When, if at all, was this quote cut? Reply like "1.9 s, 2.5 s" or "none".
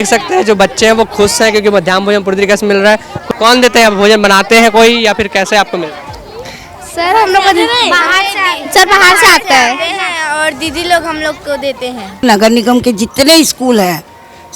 3.1 s, 12.2 s